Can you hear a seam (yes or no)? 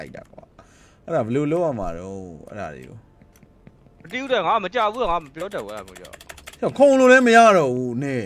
no